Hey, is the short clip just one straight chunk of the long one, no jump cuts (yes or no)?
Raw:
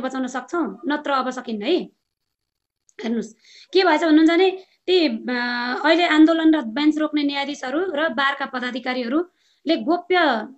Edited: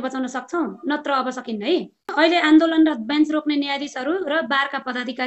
no